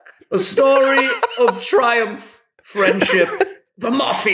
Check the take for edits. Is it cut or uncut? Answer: uncut